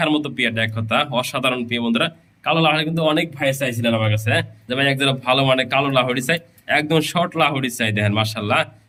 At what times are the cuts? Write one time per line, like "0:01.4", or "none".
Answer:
none